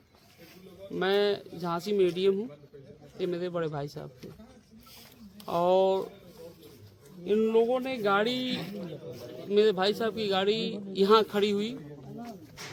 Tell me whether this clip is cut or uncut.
uncut